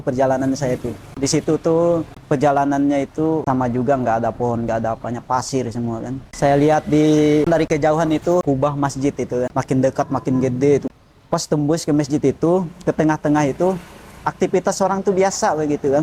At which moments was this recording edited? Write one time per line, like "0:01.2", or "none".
0:01.1
0:02.1
0:03.4
0:06.2
0:07.5
0:08.4
0:09.5
0:10.8